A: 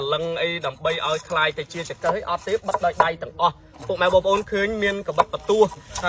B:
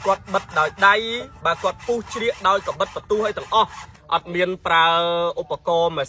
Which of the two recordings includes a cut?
B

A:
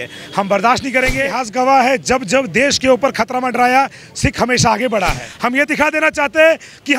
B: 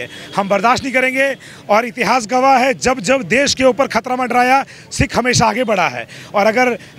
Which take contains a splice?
A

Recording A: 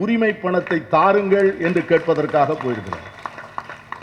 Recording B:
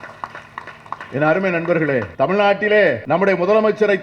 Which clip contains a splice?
B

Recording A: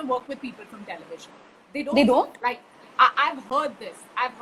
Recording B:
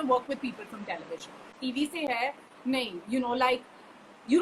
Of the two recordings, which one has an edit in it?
B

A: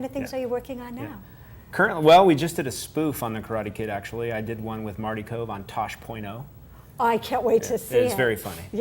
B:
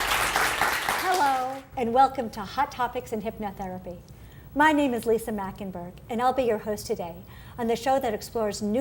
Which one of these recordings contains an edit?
A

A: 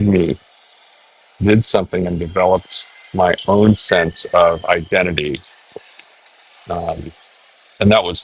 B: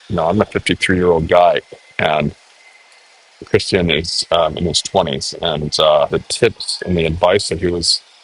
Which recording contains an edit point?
B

